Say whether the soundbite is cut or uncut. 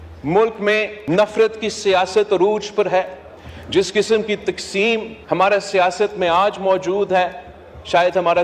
uncut